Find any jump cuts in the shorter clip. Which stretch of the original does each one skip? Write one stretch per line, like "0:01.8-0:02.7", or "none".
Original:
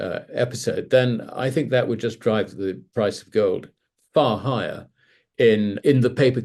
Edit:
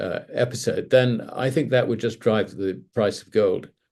none

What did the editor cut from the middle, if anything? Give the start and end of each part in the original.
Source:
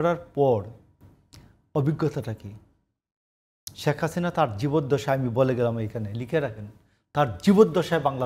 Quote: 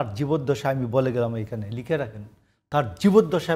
none

